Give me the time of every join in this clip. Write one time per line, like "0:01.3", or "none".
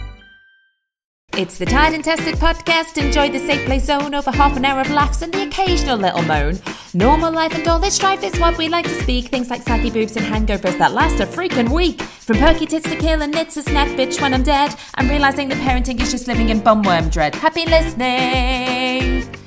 0:01.3